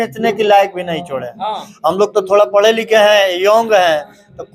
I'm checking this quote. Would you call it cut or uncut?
uncut